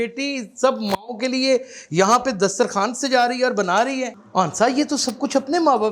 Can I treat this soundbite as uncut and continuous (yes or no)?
no